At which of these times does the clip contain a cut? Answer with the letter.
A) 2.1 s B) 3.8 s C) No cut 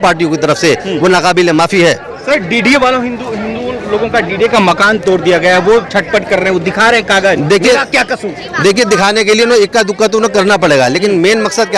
C